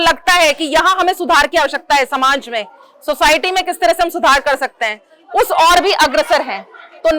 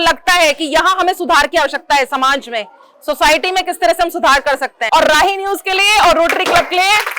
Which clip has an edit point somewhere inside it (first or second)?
second